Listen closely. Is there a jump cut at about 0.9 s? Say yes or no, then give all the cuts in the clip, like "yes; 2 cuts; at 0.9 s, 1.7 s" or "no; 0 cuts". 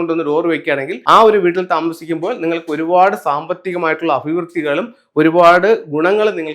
yes; 1 cut; at 0.9 s